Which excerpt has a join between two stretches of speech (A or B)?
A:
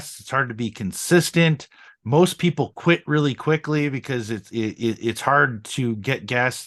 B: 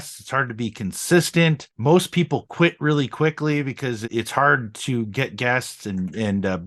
B